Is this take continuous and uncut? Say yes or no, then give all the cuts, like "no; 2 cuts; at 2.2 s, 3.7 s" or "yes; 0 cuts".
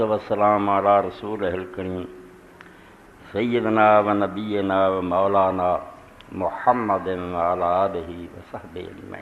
yes; 0 cuts